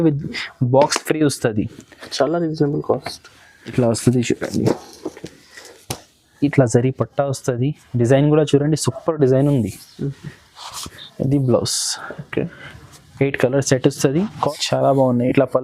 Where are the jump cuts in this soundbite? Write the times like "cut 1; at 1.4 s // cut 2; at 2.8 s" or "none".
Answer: cut 1; at 3.7 s // cut 2; at 6.4 s // cut 3; at 11.0 s // cut 4; at 14.0 s

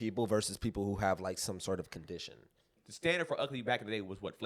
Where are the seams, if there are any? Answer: cut 1; at 2.8 s

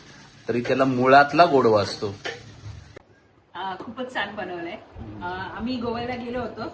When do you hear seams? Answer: cut 1; at 3.0 s

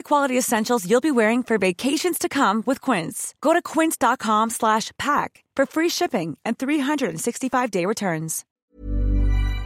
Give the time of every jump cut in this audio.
cut 1; at 8.4 s

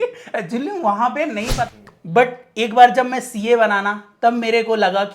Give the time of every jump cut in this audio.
cut 1; at 1.7 s

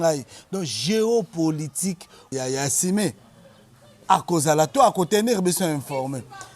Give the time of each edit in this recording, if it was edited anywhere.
cut 1; at 2.3 s

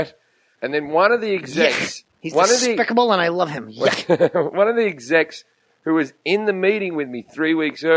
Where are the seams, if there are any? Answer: none

